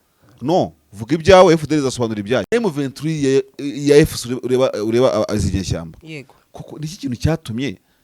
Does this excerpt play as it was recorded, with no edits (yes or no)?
no